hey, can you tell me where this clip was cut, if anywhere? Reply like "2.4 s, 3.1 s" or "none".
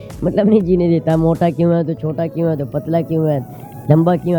none

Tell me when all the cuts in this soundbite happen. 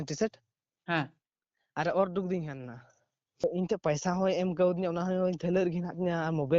3.4 s

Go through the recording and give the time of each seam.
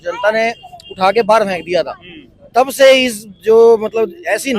none

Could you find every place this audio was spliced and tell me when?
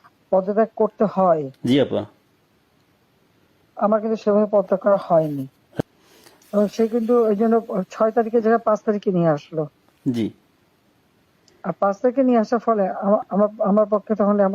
5.8 s

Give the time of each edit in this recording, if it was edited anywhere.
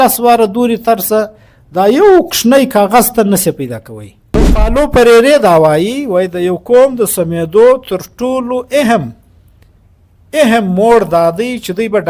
4.6 s

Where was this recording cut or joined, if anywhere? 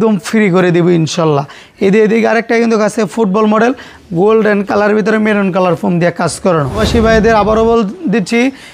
6.8 s

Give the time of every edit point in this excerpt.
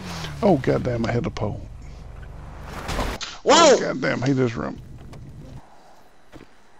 5.6 s

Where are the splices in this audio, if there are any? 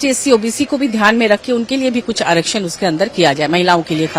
none

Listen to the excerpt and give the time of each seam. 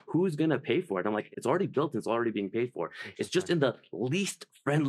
none

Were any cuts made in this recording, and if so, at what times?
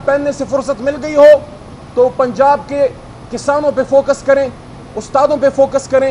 none

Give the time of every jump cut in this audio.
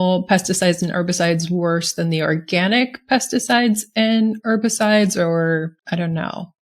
5.8 s

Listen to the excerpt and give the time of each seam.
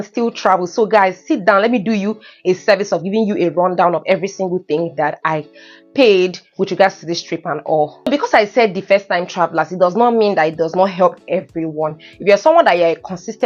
none

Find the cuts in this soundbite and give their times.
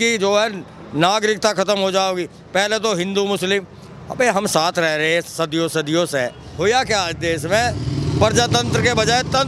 6.4 s

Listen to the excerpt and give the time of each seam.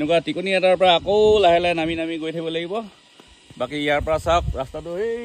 none

